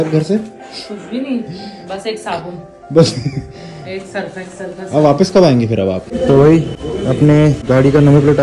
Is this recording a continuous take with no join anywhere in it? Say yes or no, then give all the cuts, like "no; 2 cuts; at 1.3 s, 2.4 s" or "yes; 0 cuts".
no; 2 cuts; at 6.1 s, 7.3 s